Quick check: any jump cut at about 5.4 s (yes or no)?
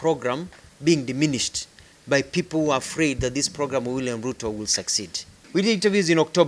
yes